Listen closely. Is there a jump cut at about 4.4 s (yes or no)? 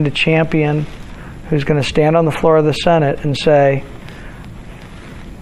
no